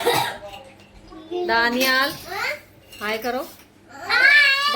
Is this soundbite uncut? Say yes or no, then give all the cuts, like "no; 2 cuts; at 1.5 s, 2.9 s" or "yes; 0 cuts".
yes; 0 cuts